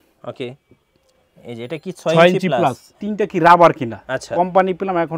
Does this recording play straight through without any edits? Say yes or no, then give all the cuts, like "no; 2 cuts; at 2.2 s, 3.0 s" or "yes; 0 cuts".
no; 1 cut; at 3.0 s